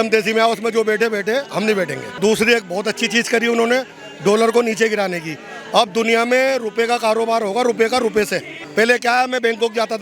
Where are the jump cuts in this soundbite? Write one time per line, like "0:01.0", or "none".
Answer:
0:02.2
0:08.6